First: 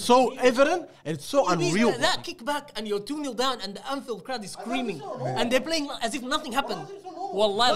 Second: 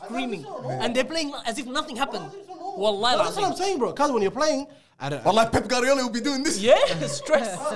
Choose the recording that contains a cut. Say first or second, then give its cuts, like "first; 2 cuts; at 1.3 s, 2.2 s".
first; 1 cut; at 2.0 s